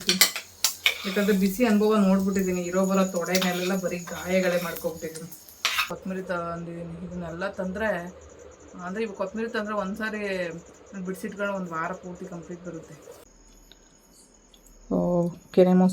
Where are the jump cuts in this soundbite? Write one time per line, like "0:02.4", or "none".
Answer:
0:05.8
0:13.3